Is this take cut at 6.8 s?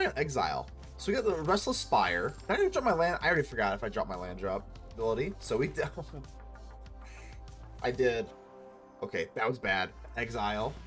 no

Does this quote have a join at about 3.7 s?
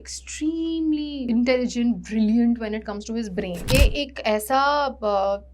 yes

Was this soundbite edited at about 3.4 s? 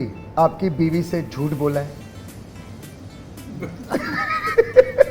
no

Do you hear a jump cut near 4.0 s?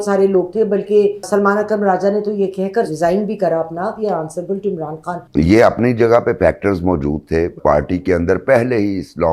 yes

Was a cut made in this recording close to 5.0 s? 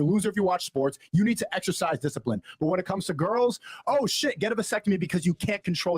yes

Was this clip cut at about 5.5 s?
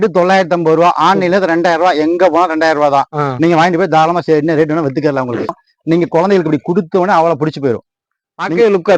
yes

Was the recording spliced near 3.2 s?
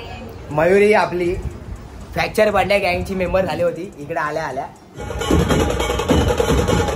no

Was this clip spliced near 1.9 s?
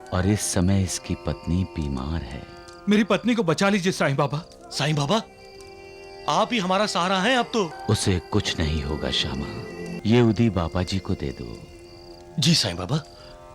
no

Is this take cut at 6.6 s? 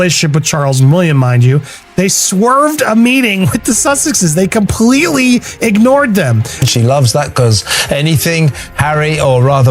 yes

